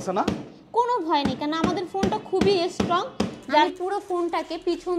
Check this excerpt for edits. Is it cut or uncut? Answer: cut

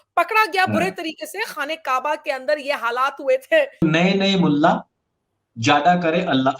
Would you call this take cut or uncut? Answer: cut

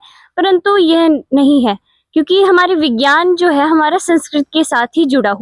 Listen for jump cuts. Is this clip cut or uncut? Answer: uncut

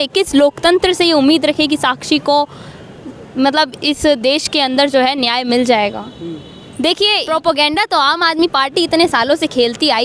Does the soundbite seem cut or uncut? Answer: cut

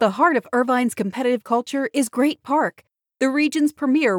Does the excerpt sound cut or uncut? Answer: uncut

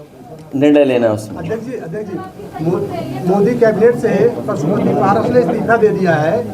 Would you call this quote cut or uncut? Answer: uncut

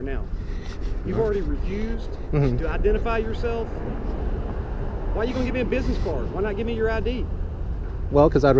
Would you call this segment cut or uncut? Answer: uncut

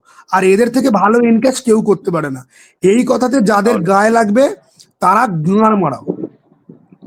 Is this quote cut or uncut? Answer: uncut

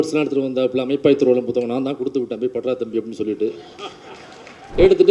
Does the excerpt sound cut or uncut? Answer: uncut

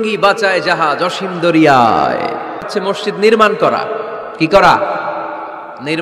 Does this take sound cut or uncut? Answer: cut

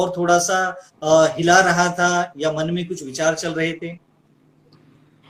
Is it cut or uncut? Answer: uncut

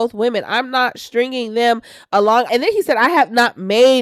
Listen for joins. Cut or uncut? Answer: cut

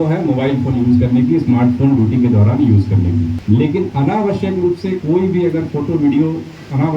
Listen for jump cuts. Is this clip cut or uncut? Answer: cut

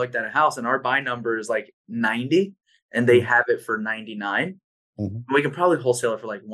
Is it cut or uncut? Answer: uncut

